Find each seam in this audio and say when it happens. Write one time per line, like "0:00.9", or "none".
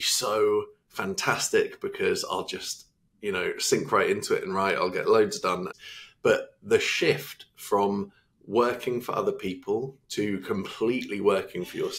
0:05.7